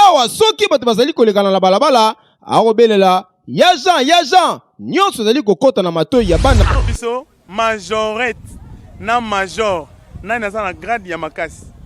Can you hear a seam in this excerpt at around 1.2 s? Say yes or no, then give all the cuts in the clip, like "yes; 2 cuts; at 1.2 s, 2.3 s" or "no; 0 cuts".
no; 1 cut; at 6.6 s